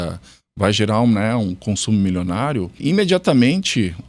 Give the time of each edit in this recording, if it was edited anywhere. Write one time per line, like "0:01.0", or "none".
0:02.7